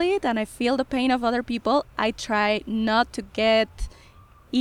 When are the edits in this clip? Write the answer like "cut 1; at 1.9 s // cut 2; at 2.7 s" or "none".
none